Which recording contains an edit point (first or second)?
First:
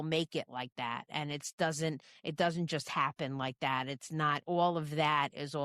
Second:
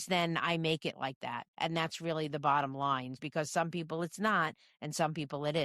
second